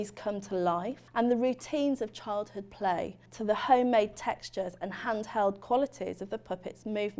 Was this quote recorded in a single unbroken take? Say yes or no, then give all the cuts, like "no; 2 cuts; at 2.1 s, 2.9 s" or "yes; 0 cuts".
no; 2 cuts; at 1.0 s, 3.3 s